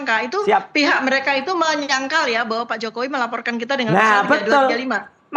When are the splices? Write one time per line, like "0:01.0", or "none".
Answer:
none

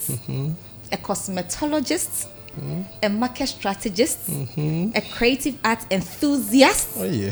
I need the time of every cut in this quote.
none

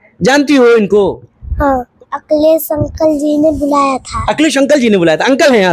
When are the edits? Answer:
0:01.9

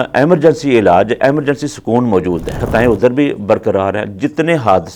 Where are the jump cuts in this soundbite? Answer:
0:02.6

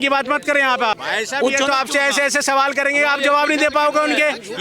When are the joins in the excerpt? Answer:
0:01.0

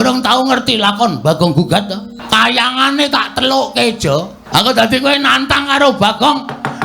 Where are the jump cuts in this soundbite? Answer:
0:02.1
0:04.4

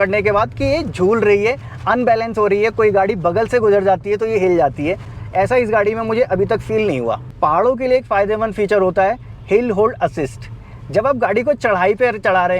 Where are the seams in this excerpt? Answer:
none

